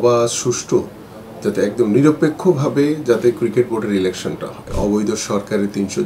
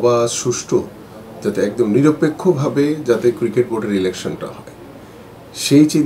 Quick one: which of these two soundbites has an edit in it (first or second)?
first